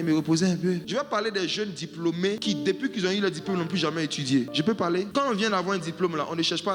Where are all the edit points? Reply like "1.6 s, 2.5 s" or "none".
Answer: 0.8 s, 2.4 s, 4.5 s

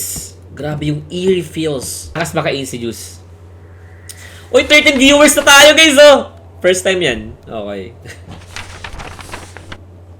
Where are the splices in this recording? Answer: 2.2 s

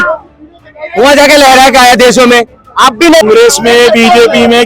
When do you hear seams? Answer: 3.2 s

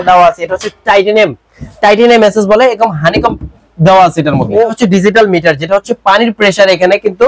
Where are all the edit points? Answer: 4.7 s

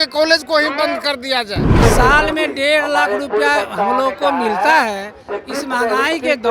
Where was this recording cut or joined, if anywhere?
1.8 s

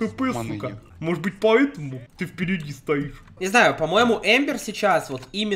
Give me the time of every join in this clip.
3.2 s

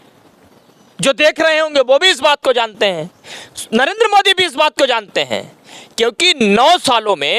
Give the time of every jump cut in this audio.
none

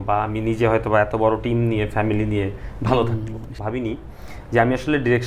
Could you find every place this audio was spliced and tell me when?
3.6 s

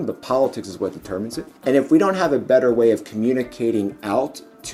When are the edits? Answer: 1.5 s

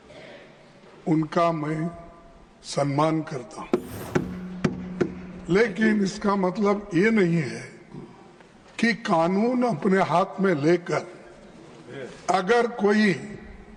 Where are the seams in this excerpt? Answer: none

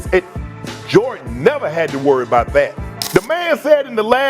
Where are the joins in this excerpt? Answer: 2.8 s

